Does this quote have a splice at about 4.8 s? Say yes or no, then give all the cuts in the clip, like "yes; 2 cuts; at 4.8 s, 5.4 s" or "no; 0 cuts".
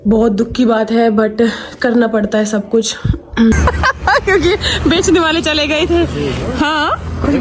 no; 1 cut; at 3.5 s